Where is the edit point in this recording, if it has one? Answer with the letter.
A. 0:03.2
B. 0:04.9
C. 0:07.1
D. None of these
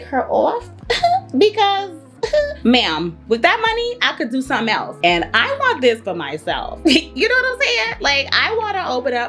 B